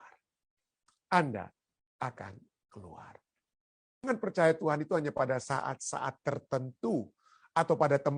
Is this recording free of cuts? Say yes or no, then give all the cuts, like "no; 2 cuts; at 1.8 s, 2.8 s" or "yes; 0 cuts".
no; 1 cut; at 4.0 s